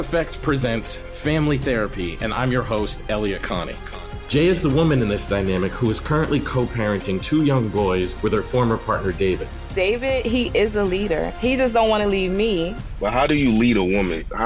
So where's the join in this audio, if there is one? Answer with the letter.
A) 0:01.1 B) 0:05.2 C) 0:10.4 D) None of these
D